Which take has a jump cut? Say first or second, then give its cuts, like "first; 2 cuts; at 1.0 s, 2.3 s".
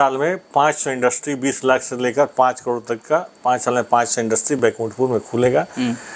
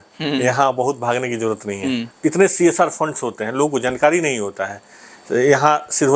second; 1 cut; at 2.1 s